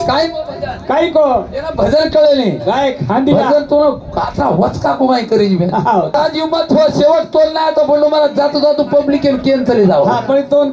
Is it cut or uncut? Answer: cut